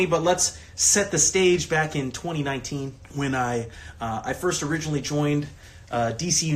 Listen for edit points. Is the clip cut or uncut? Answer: cut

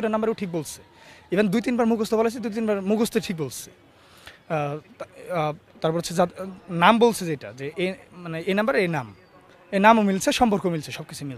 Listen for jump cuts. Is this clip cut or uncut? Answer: uncut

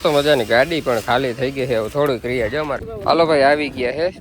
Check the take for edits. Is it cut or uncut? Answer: cut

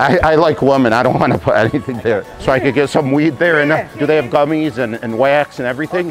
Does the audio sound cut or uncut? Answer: cut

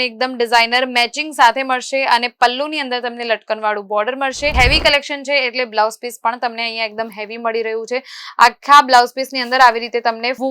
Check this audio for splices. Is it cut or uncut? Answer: cut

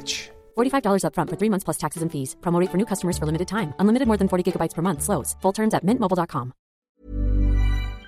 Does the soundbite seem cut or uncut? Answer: cut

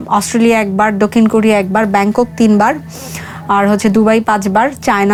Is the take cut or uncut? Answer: uncut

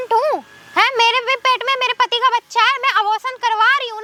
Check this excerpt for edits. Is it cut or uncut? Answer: uncut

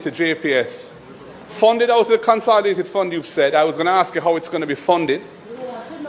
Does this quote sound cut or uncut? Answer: uncut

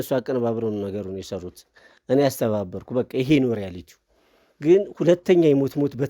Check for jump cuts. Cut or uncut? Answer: uncut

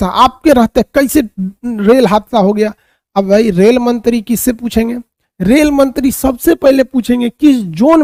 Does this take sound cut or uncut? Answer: uncut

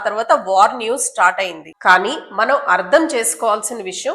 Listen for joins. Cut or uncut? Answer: cut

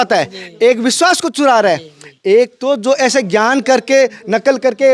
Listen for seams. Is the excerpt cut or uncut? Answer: uncut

